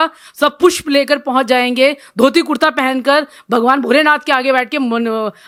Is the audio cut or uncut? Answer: uncut